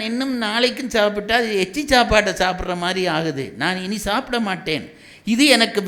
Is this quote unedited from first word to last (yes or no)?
yes